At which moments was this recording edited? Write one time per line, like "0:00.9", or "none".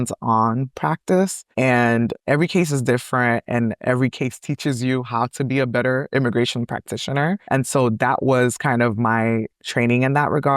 0:01.4
0:07.4

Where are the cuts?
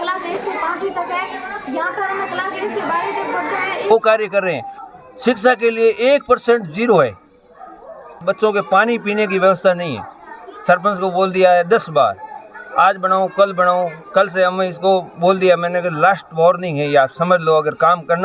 0:03.9
0:08.2

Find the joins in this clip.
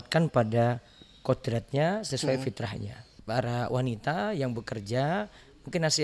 0:03.1

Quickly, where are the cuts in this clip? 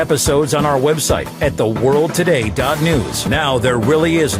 0:03.2

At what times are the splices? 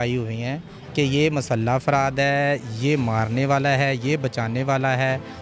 none

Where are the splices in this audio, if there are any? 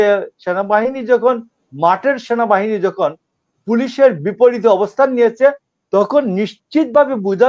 none

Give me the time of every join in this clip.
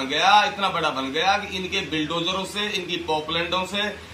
none

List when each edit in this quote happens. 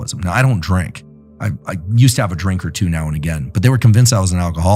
none

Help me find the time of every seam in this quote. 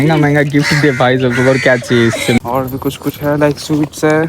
0:02.4

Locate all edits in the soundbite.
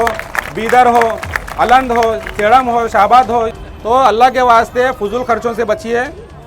0:03.5

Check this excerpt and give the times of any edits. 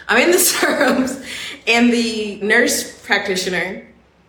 0:02.4

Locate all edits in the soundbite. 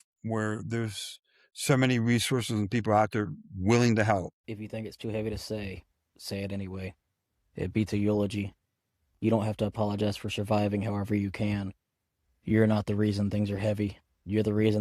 0:04.4

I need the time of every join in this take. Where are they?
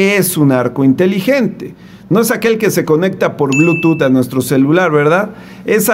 none

